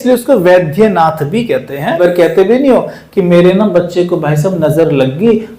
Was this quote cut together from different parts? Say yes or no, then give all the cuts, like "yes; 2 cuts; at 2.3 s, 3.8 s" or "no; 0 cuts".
yes; 1 cut; at 2.0 s